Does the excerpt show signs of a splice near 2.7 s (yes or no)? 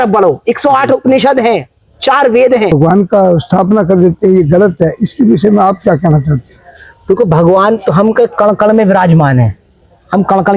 yes